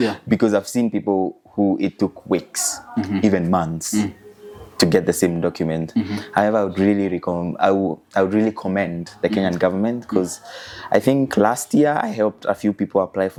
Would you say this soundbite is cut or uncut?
uncut